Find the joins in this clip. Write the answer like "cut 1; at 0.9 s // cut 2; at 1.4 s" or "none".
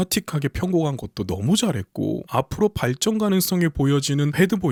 none